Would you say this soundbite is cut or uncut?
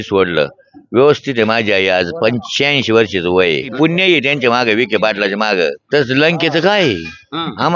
cut